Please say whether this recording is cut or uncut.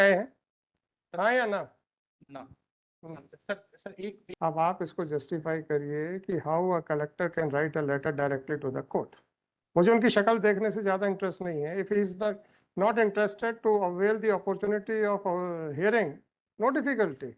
cut